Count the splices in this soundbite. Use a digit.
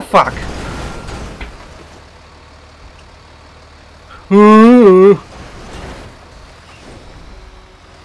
0